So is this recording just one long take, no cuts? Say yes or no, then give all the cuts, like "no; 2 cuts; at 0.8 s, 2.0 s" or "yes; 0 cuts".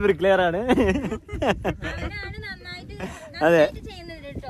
yes; 0 cuts